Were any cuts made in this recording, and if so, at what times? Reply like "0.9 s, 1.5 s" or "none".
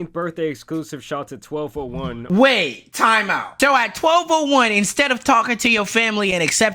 2.2 s